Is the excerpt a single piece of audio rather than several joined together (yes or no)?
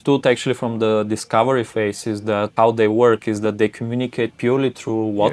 no